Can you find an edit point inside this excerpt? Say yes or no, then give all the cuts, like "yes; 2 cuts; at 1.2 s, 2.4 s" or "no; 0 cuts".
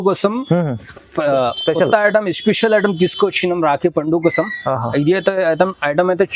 no; 0 cuts